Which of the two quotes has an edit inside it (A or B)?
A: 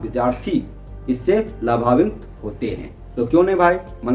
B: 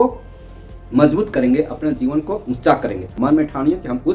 B